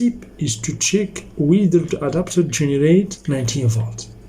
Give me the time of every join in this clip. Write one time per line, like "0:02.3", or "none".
0:03.2

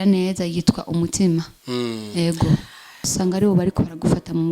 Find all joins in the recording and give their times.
0:03.1

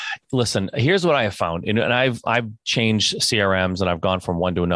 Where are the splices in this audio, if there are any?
none

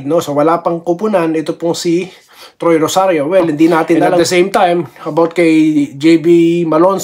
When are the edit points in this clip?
0:04.2

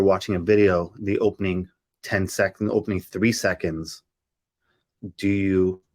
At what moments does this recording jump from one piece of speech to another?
0:04.9

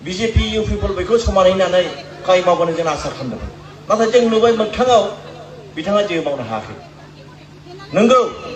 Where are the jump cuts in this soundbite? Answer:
none

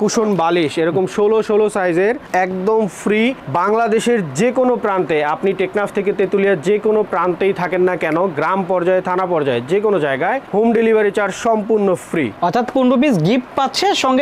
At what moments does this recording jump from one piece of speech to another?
none

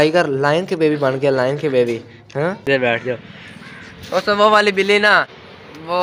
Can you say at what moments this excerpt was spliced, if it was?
0:02.6

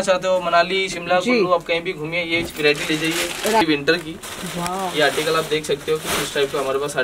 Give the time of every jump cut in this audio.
0:03.6

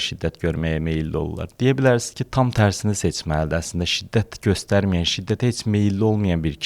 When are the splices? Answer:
none

